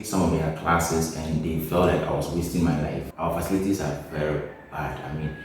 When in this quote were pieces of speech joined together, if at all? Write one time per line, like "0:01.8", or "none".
0:03.1